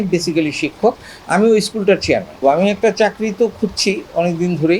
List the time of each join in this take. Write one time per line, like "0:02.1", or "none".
0:02.4